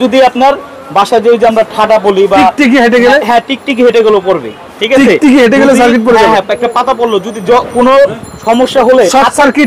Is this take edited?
no; 0 cuts

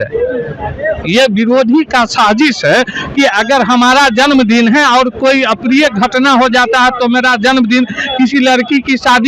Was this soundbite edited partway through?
no; 0 cuts

